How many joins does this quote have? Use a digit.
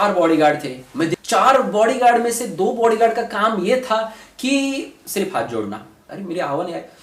2